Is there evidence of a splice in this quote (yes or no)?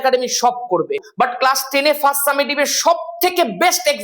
yes